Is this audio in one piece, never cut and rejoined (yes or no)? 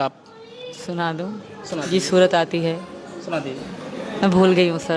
yes